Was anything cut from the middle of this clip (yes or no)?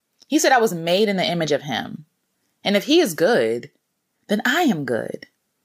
no